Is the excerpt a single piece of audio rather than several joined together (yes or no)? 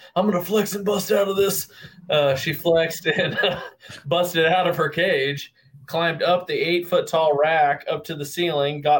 yes